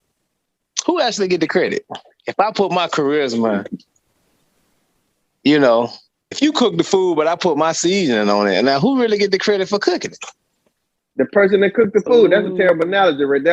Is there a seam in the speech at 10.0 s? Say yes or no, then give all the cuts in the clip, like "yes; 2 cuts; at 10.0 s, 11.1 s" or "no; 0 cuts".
no; 1 cut; at 6.4 s